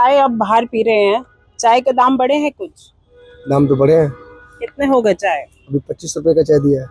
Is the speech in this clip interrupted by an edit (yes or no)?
no